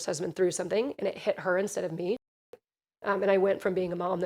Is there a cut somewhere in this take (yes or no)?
yes